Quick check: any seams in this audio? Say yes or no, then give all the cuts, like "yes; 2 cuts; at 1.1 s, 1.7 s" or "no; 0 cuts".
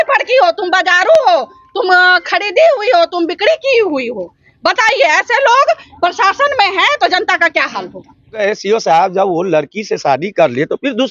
yes; 1 cut; at 8.4 s